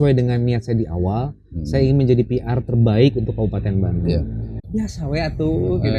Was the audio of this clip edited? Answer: yes; 1 cut; at 4.4 s

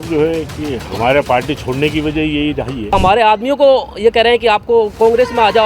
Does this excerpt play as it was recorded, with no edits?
no; 1 cut; at 2.9 s

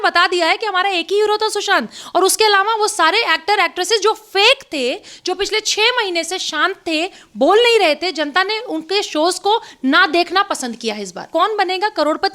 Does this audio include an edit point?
yes; 1 cut; at 11.2 s

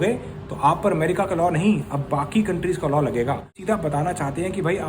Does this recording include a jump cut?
yes; 1 cut; at 3.5 s

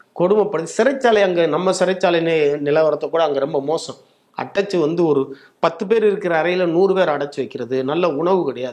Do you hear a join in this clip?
no; 0 cuts

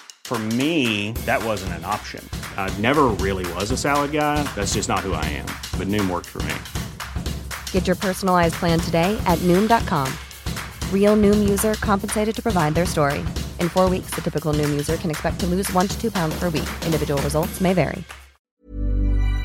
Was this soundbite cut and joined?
yes; 1 cut; at 18.5 s

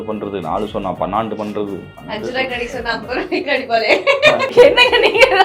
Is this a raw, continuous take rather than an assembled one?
no; 1 cut; at 4.5 s

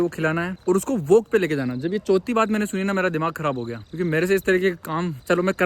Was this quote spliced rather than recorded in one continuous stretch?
no; 0 cuts

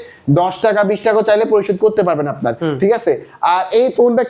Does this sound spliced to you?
no; 0 cuts

